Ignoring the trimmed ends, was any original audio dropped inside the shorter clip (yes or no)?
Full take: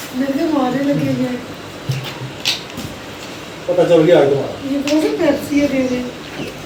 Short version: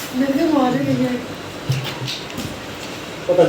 yes